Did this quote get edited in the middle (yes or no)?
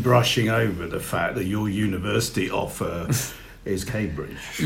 no